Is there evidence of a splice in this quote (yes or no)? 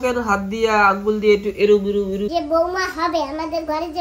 yes